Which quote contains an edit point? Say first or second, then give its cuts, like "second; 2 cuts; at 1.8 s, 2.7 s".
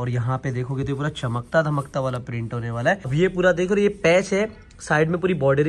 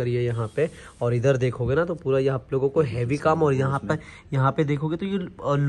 first; 1 cut; at 3.1 s